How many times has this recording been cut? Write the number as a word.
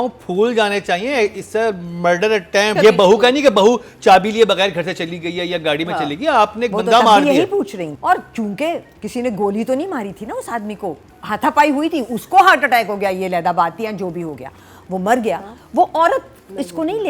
two